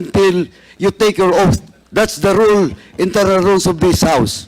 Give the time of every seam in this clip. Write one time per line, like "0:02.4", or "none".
0:01.7